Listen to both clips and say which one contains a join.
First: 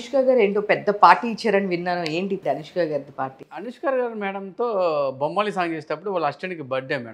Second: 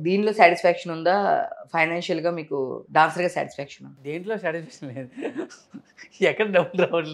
first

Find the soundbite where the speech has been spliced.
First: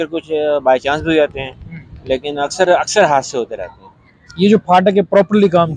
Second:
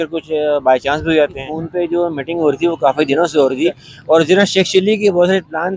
second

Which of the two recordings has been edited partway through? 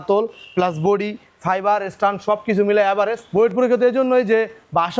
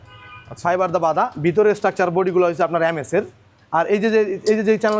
first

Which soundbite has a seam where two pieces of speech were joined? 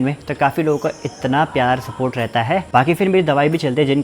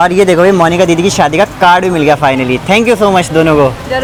first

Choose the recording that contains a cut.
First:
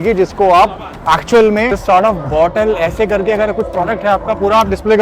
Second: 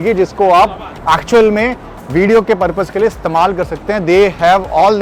first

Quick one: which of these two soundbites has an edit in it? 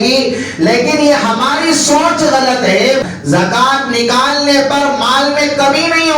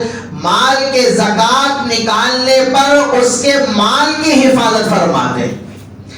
first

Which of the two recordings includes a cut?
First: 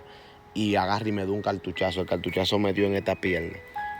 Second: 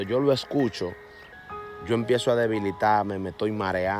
second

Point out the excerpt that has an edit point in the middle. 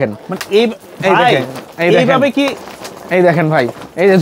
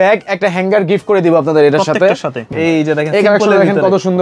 second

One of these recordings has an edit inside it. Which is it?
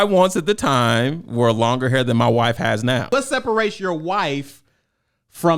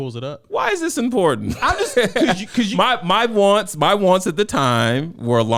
first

